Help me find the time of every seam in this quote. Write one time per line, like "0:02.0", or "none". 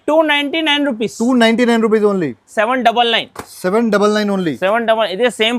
0:02.5